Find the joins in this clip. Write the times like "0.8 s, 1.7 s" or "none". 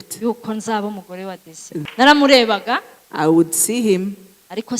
1.8 s

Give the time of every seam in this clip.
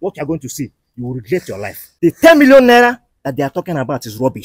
1.8 s

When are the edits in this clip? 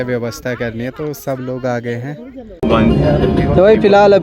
2.4 s

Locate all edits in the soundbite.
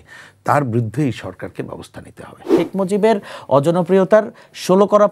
2.5 s

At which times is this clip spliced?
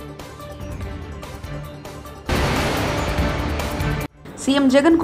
2.2 s, 4.1 s

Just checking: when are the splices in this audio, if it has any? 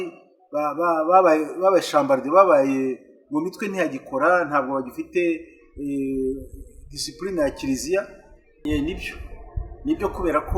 8.6 s

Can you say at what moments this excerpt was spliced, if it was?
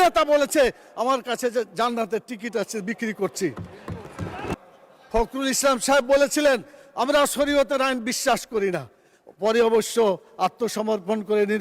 4.5 s

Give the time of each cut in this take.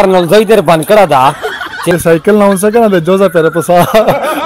1.9 s

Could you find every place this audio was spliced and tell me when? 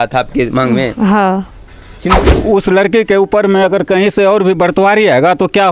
2.1 s

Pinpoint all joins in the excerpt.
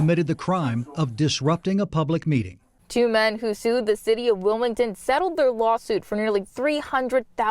2.8 s

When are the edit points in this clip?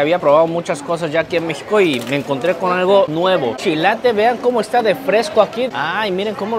3.6 s, 5.7 s

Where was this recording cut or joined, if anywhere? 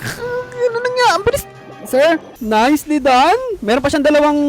2.3 s

